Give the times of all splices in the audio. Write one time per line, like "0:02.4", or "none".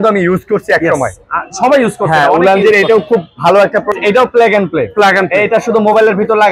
0:03.9